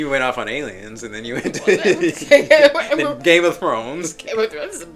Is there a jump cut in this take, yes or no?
no